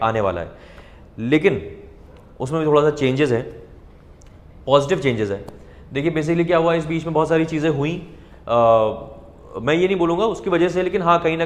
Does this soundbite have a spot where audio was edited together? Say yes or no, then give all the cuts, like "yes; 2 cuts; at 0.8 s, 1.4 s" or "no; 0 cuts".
no; 0 cuts